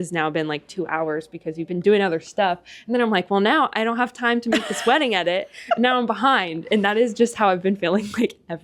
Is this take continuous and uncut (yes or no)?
yes